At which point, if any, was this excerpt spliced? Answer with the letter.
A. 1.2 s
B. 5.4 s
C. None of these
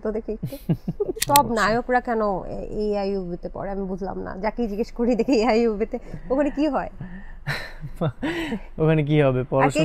A